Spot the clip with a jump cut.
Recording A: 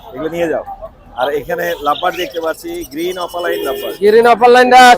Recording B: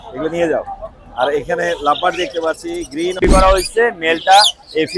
B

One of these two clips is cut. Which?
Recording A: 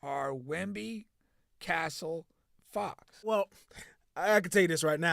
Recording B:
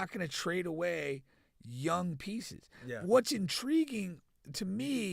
A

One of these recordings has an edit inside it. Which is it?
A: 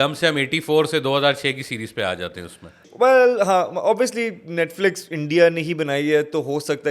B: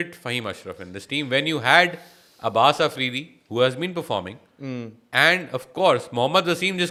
A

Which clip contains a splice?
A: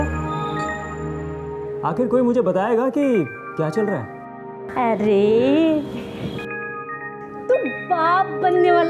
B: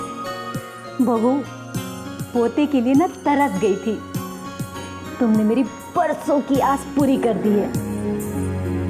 B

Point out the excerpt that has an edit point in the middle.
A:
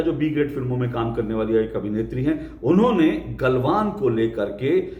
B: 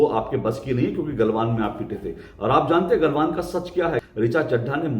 B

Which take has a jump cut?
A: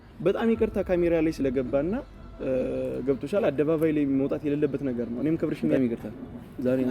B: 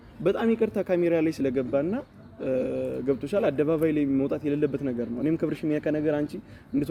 A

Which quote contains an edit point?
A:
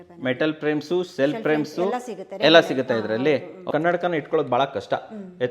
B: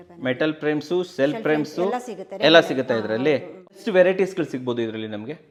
A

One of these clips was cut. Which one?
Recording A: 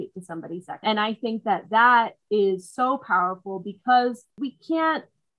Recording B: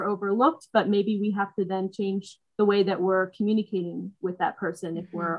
A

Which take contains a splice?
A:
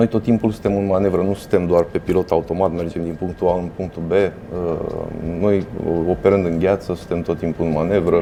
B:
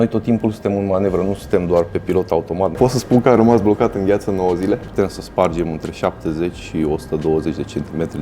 B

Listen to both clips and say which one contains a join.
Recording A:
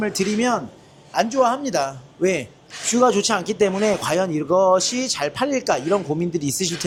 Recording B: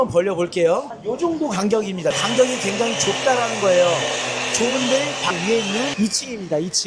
B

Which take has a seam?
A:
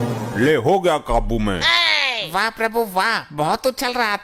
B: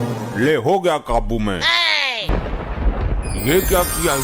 B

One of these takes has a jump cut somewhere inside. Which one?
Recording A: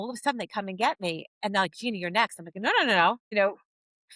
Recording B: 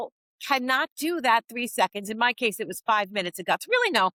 A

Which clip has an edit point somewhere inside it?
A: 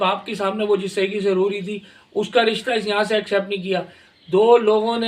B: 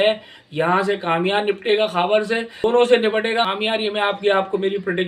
B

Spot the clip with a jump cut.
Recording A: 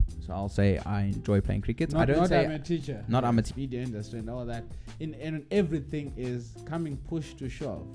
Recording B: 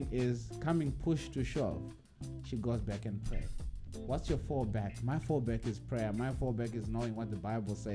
A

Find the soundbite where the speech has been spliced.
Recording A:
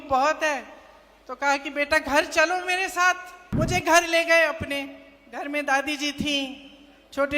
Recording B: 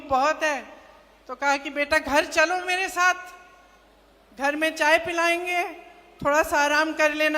A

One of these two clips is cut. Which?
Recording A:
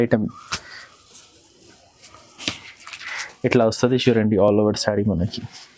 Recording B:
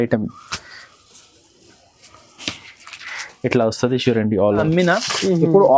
B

